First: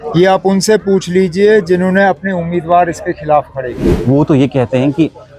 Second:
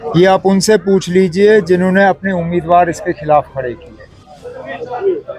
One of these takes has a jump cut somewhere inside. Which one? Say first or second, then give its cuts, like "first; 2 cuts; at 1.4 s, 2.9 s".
first; 1 cut; at 3.8 s